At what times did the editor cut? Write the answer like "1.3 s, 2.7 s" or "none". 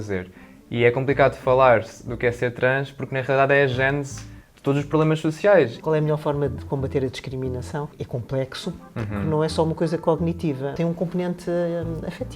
5.8 s, 8.0 s, 10.7 s